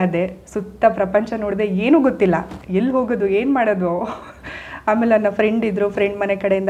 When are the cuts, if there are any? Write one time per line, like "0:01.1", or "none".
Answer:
none